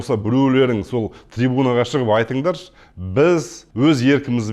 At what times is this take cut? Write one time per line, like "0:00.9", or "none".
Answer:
0:03.6